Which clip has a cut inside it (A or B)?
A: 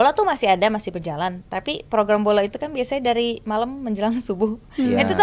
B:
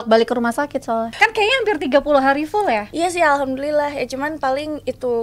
B